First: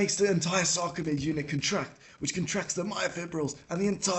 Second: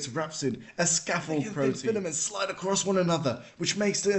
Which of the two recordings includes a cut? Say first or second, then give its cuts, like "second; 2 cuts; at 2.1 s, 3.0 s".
second; 1 cut; at 1.8 s